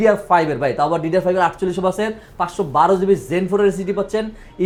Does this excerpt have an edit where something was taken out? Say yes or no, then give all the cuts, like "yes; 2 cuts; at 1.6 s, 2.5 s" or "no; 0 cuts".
no; 0 cuts